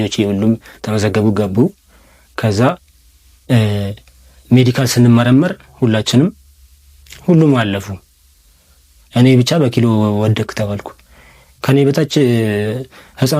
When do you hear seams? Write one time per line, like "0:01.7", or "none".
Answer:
none